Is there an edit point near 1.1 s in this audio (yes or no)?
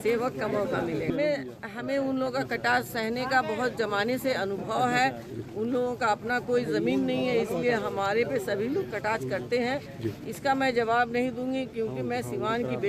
yes